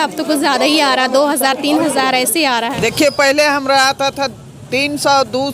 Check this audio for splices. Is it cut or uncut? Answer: cut